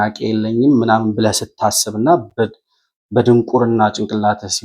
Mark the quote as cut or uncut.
uncut